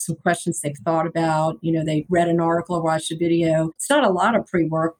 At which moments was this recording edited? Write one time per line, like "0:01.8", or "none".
0:02.0
0:03.8